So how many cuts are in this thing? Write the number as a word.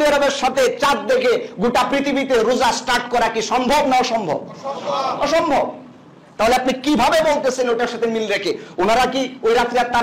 zero